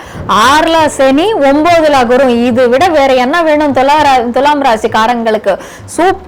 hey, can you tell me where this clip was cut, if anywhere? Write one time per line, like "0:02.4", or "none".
none